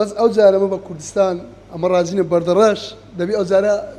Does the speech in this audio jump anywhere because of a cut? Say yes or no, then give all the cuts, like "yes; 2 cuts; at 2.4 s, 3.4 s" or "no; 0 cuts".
no; 0 cuts